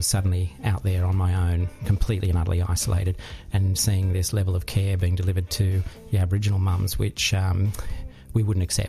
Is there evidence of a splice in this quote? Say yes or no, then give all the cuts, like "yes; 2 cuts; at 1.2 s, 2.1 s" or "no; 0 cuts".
no; 0 cuts